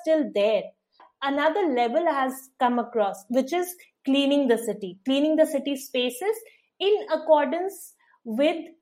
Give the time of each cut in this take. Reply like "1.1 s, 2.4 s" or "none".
1.0 s